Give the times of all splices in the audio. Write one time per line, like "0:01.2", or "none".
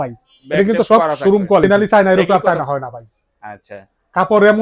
0:01.6